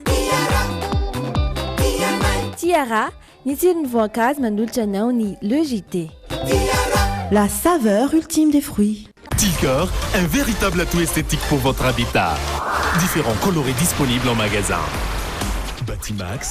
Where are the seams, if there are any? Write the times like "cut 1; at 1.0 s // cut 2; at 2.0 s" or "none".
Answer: none